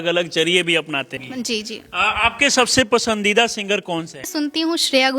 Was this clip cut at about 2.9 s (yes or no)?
no